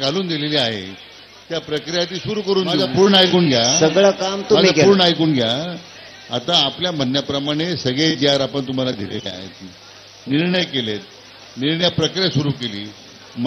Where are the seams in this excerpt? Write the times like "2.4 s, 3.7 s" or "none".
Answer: 2.9 s